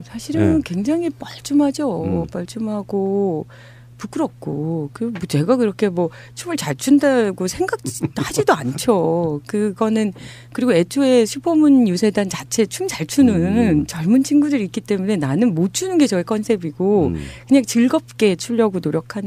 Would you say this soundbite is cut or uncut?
cut